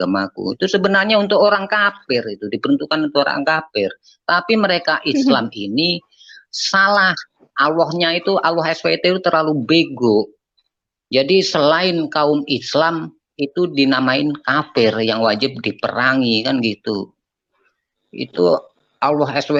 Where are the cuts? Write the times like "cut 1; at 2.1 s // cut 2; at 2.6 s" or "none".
none